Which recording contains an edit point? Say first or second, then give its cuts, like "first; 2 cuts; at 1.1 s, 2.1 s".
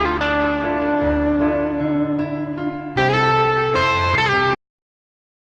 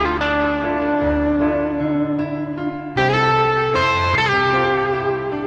second; 1 cut; at 4.5 s